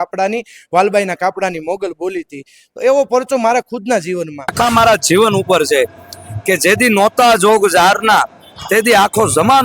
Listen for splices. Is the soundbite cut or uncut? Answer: cut